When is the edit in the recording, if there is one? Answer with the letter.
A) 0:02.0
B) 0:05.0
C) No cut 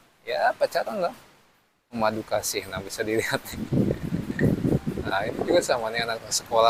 C